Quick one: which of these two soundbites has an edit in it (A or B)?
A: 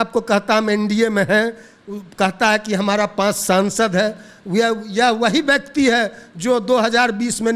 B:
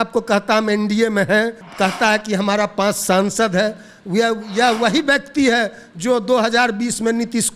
B